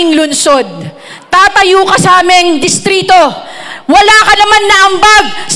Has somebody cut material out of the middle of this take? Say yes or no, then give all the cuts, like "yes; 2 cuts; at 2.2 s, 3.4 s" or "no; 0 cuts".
no; 0 cuts